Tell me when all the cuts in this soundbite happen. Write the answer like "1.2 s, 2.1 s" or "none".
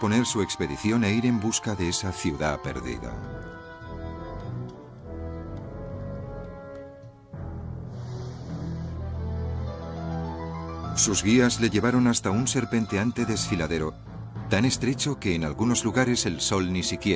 13.4 s

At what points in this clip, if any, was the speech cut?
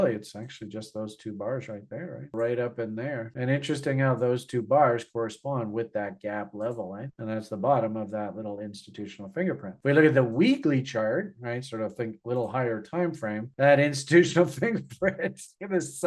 7.1 s

